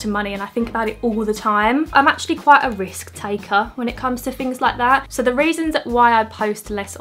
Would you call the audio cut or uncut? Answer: cut